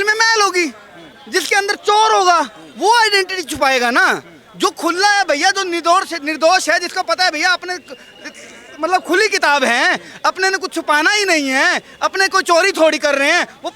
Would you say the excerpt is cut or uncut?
uncut